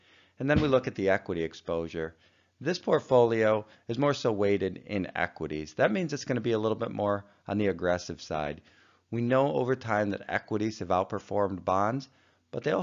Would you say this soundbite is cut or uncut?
cut